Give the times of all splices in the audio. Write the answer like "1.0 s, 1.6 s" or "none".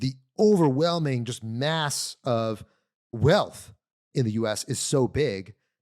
3.1 s